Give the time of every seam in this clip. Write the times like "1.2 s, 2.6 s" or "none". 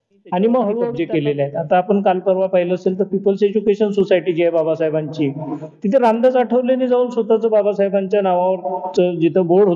1.0 s